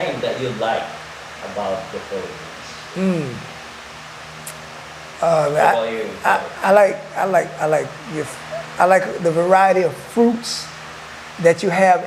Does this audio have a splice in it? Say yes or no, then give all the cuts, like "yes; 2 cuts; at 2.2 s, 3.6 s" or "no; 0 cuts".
no; 0 cuts